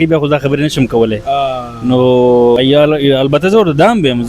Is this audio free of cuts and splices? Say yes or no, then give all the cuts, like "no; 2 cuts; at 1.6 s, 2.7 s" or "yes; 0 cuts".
no; 1 cut; at 2.6 s